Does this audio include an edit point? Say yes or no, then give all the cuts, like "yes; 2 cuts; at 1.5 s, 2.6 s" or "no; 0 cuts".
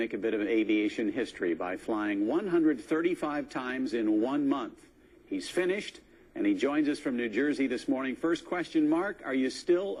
no; 0 cuts